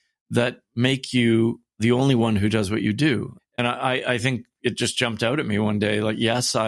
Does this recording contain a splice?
yes; 2 cuts; at 1.7 s, 3.3 s

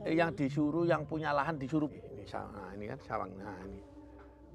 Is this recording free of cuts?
no; 1 cut; at 1.9 s

